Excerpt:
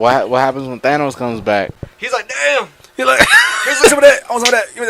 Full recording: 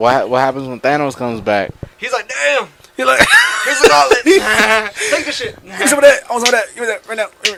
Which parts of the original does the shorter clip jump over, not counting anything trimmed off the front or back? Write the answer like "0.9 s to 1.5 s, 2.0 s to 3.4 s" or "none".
3.9 s to 5.9 s